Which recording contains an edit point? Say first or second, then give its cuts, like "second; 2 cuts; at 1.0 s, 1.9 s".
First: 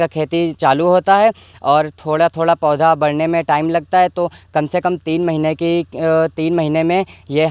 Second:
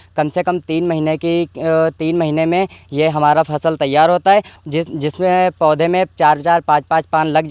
second; 1 cut; at 4.5 s